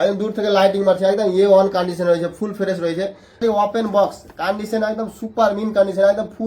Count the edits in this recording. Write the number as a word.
one